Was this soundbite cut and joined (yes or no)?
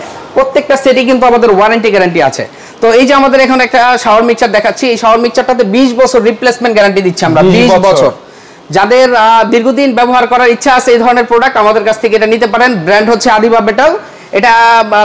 no